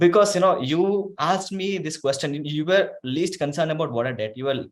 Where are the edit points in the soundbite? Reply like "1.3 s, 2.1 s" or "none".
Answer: none

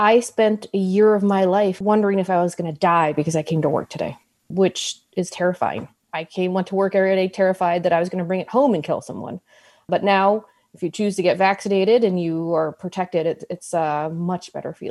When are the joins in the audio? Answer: 1.8 s, 6.0 s

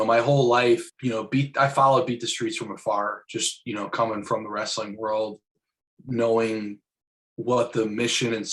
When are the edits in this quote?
0.9 s

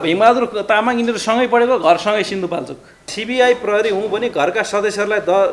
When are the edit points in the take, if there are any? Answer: 3.2 s

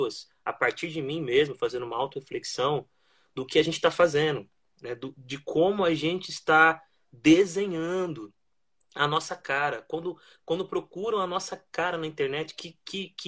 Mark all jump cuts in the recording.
none

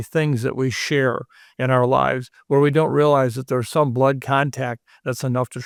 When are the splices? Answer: none

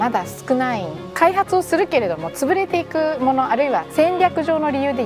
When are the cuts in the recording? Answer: 1.0 s, 3.9 s

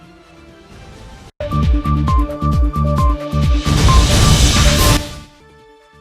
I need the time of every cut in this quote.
1.3 s

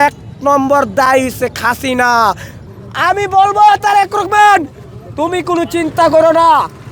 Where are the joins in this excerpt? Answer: 2.7 s

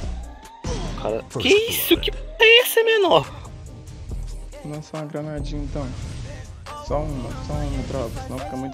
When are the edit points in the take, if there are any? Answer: none

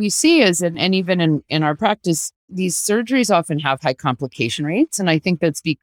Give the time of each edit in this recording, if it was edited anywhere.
2.5 s

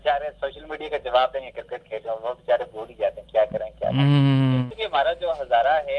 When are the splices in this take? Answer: 4.6 s

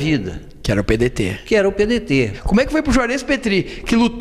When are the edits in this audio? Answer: 2.4 s

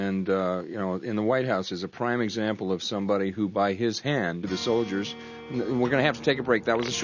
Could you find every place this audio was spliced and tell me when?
none

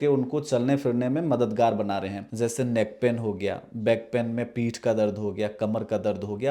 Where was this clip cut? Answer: 2.2 s

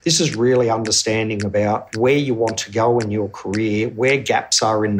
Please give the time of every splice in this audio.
1.9 s

